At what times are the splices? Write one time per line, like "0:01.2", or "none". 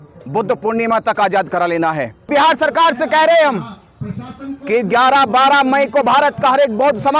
0:02.3